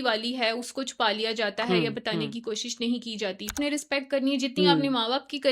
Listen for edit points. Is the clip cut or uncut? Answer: cut